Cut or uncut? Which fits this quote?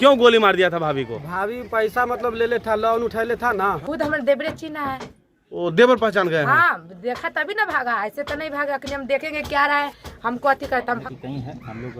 cut